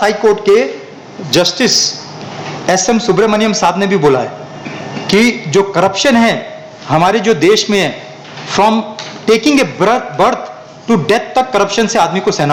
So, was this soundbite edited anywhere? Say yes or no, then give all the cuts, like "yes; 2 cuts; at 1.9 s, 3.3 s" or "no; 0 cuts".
no; 0 cuts